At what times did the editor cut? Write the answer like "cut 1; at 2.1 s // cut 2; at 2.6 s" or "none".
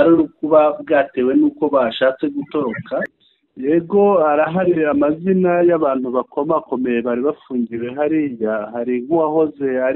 cut 1; at 3.2 s